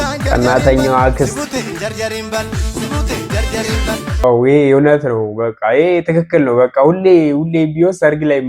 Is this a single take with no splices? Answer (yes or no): no